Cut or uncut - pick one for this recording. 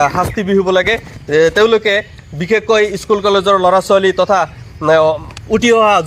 uncut